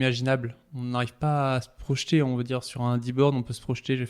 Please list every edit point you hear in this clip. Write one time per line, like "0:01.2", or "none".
none